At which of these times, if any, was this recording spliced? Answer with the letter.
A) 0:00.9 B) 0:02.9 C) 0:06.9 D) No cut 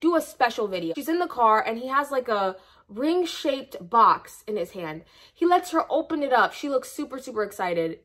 A